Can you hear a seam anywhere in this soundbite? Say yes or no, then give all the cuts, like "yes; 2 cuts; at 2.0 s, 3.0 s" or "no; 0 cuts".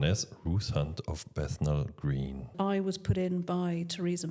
yes; 1 cut; at 2.5 s